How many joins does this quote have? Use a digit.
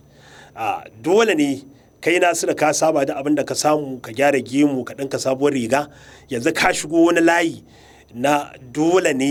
0